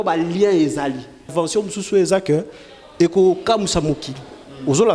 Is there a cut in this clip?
yes; 1 cut; at 1.3 s

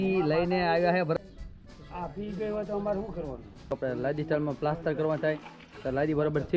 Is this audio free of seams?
no; 2 cuts; at 1.1 s, 3.8 s

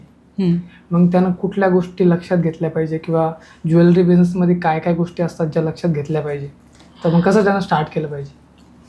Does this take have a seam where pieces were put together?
no; 0 cuts

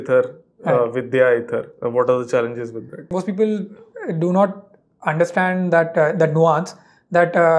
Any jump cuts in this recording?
yes; 1 cut; at 3.1 s

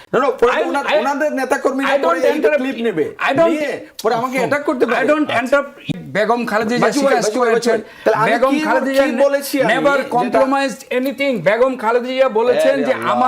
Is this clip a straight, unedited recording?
no; 1 cut; at 5.9 s

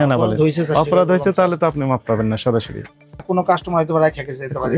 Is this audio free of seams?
no; 1 cut; at 3.3 s

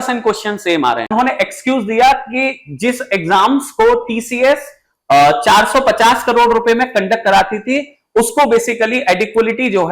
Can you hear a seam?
yes; 1 cut; at 1.1 s

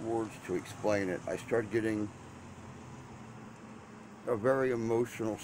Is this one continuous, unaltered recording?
yes; 0 cuts

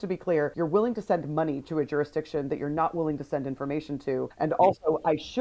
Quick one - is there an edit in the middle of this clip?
yes; 2 cuts; at 1.6 s, 4.3 s

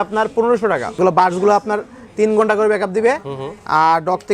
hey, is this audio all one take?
no; 1 cut; at 1.0 s

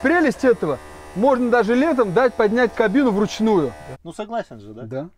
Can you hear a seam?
yes; 1 cut; at 3.8 s

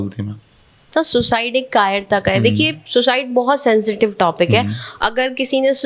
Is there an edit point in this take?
yes; 1 cut; at 0.9 s

